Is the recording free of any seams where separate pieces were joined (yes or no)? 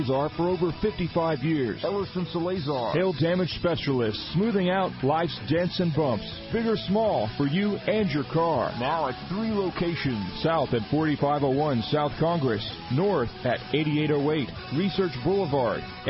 yes